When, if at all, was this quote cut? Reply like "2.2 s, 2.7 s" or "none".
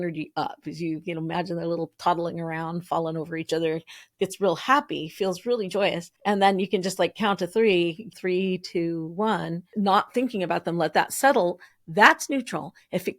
6.1 s, 8.2 s, 9.6 s